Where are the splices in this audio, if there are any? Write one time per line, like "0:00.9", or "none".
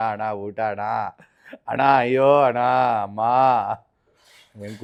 none